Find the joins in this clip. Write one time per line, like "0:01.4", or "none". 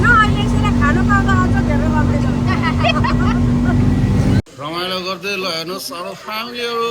0:04.4